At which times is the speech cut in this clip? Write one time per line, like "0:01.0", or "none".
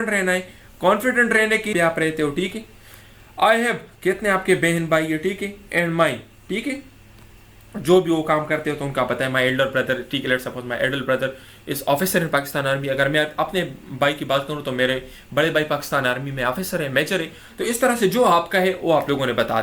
0:01.7